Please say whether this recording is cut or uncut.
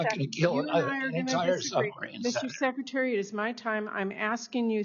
uncut